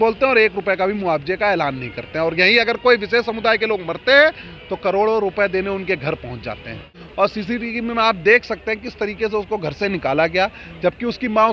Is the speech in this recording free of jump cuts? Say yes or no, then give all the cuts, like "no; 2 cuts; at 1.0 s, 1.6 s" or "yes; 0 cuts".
no; 1 cut; at 7.0 s